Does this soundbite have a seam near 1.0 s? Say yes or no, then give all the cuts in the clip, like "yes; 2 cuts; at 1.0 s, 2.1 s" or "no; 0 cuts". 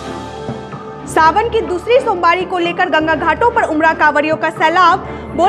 yes; 1 cut; at 1.0 s